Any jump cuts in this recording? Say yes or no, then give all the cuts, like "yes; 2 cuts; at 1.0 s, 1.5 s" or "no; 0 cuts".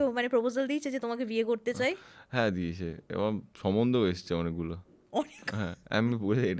no; 0 cuts